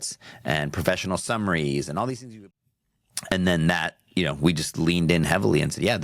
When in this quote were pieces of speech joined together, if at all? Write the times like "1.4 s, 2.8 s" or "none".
2.4 s